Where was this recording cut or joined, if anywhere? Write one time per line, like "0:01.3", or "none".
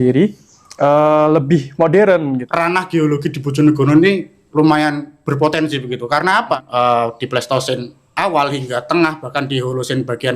0:02.5
0:06.6

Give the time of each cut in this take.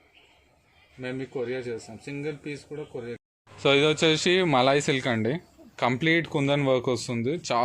0:03.2

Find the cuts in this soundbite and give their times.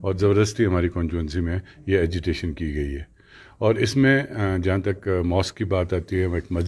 none

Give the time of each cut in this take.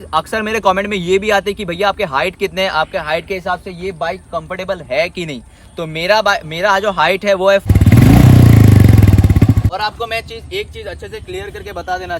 0:07.7
0:09.7

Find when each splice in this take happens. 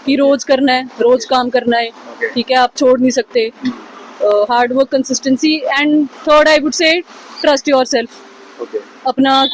none

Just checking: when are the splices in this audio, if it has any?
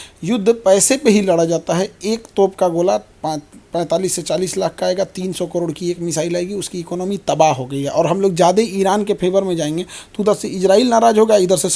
none

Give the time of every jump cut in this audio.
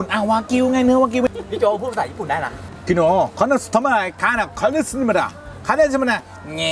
0:01.3
0:02.8

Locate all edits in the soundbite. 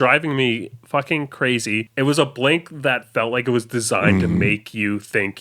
0:01.9

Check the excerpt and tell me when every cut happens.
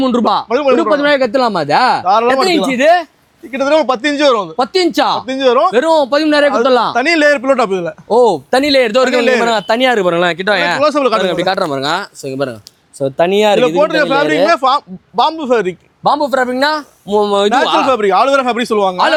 none

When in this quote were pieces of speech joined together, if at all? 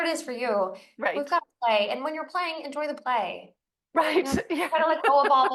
none

